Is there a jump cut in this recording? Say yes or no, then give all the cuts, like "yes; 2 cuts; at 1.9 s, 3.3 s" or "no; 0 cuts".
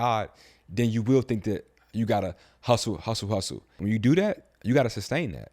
yes; 1 cut; at 3.8 s